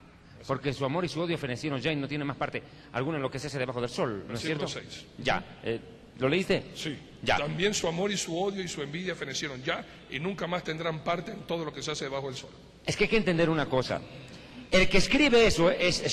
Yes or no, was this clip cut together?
no